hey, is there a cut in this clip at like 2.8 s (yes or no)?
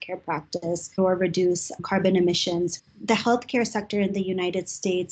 yes